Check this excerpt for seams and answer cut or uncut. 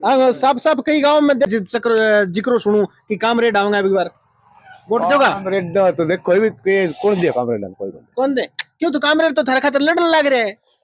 cut